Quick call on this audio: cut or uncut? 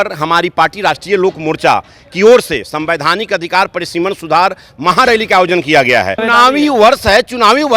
cut